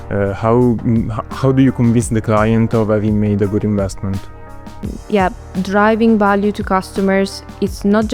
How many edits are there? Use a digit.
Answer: 1